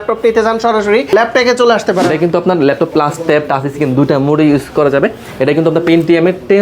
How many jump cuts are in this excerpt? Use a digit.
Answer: 2